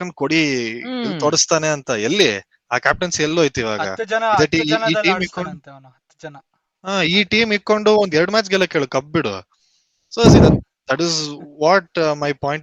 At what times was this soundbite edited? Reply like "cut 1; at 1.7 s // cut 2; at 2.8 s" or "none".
none